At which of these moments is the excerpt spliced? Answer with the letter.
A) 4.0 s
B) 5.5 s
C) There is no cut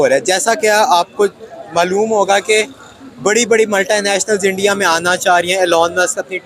C